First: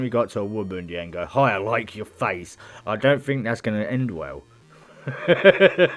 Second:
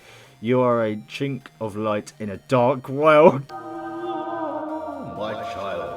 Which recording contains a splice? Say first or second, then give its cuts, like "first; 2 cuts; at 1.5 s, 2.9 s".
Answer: second; 1 cut; at 3.4 s